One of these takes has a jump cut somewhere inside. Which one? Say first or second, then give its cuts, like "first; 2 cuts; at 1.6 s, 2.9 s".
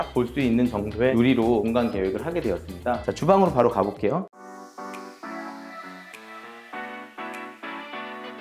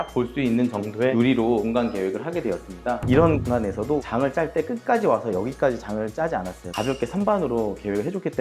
second; 2 cuts; at 3.0 s, 6.8 s